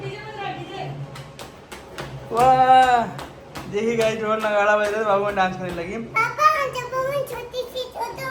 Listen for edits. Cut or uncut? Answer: uncut